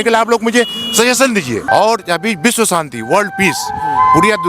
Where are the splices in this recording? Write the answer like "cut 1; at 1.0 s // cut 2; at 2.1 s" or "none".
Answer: cut 1; at 1.6 s